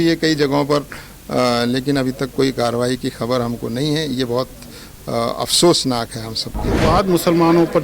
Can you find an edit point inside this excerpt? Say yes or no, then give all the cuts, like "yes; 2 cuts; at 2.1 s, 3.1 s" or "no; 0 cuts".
yes; 1 cut; at 6.8 s